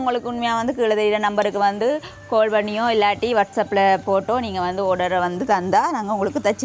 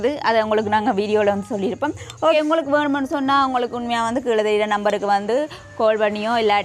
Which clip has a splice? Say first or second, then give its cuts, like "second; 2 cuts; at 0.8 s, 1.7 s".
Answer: second; 1 cut; at 2.3 s